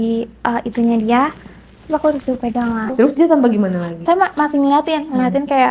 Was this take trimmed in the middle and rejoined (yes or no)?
yes